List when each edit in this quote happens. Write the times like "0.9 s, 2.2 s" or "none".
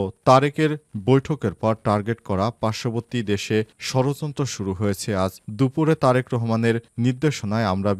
none